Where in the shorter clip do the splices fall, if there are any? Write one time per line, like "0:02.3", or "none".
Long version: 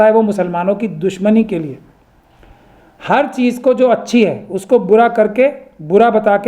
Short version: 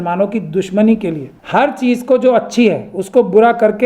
0:01.3